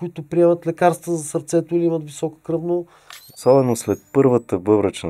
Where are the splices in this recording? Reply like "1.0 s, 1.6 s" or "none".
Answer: 3.3 s